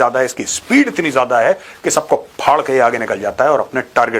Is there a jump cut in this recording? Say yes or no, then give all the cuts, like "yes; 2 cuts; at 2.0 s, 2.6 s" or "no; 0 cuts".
no; 0 cuts